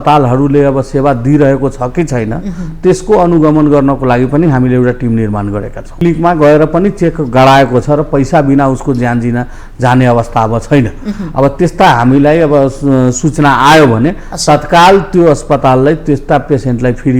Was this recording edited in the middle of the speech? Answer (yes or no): yes